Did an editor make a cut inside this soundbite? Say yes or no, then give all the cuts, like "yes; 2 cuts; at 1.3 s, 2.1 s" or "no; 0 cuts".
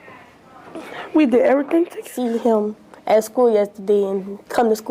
yes; 1 cut; at 2.1 s